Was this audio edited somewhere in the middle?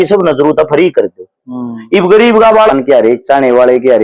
yes; 1 cut; at 2.7 s

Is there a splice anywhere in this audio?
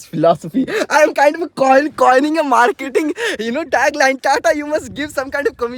no; 0 cuts

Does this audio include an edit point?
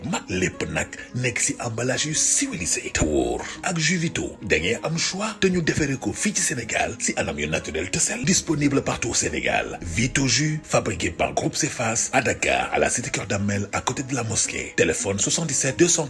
no; 0 cuts

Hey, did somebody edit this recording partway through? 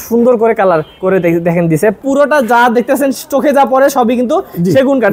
yes; 2 cuts; at 0.9 s, 2.0 s

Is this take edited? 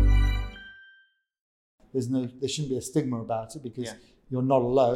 yes; 1 cut; at 1.6 s

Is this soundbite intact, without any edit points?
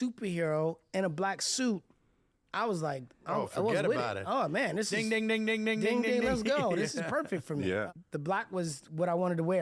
no; 1 cut; at 8.0 s

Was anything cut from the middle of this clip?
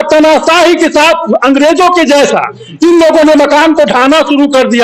no; 0 cuts

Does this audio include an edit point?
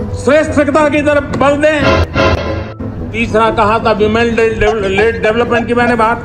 no; 0 cuts

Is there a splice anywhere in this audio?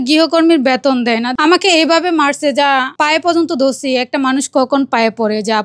yes; 1 cut; at 1.3 s

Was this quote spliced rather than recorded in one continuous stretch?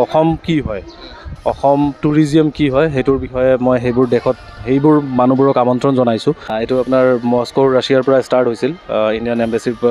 yes; 1 cut; at 6.5 s

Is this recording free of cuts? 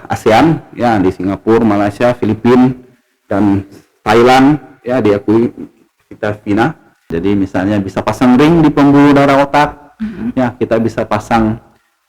no; 1 cut; at 7.1 s

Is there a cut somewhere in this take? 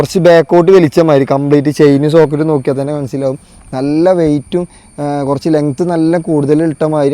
no; 0 cuts

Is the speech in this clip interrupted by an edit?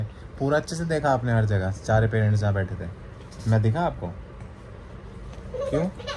no; 0 cuts

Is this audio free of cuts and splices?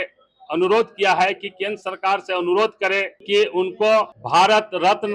no; 2 cuts; at 3.1 s, 4.2 s

